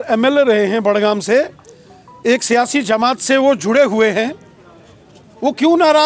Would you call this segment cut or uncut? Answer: uncut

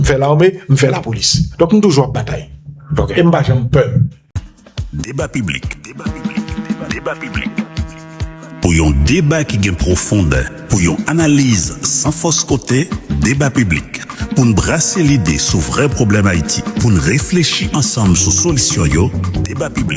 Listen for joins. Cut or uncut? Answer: cut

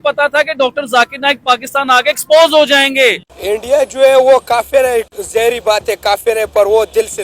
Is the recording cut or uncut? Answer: cut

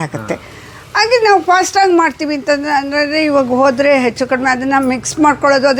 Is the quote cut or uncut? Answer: uncut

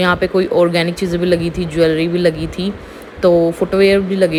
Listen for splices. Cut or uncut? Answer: uncut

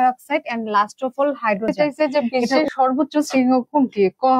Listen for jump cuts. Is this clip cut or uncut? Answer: cut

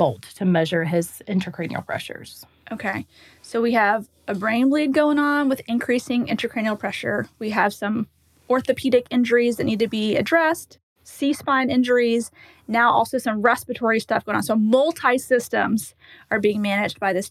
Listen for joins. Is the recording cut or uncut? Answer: uncut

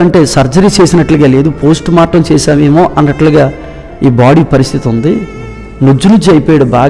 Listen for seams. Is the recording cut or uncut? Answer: uncut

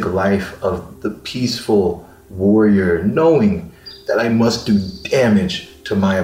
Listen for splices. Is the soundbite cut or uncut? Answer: uncut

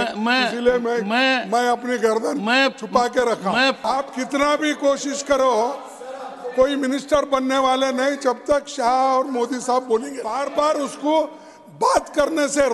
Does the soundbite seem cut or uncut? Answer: cut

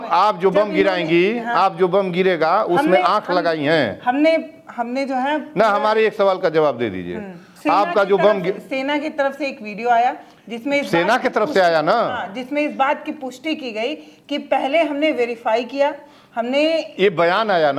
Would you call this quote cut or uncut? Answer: uncut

